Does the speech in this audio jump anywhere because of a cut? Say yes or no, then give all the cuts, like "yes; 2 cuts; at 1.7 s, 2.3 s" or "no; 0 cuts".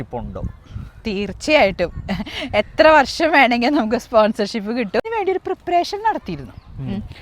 yes; 1 cut; at 5.1 s